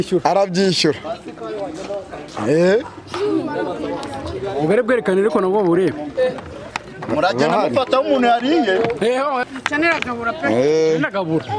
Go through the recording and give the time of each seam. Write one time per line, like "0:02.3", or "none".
0:09.5

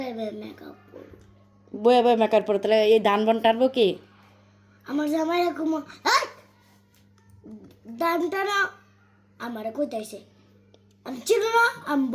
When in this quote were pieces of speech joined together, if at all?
none

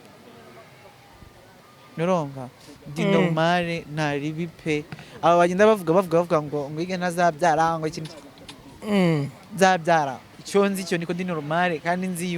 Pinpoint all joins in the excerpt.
0:10.3

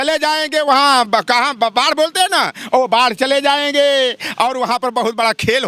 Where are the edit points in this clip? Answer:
none

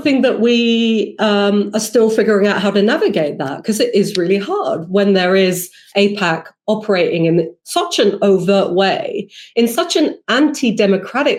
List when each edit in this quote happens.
none

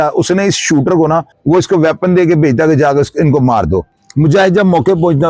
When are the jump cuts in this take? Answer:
0:01.3
0:04.0

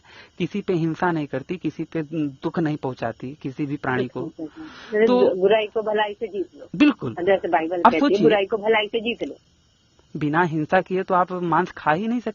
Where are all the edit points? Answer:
0:09.4

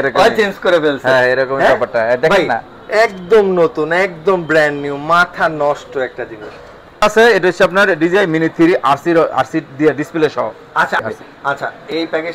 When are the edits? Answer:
0:07.0
0:11.0

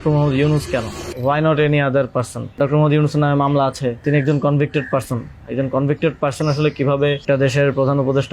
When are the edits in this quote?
0:01.0
0:02.6
0:04.0
0:07.2

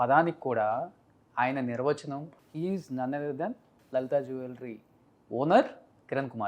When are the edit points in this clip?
0:02.3
0:03.7

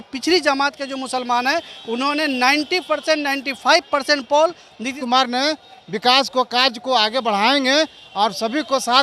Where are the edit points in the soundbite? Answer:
0:05.0

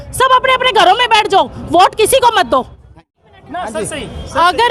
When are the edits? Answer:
0:02.9

